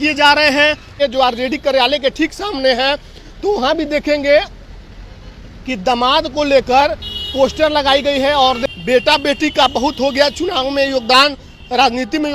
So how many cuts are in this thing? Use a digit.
2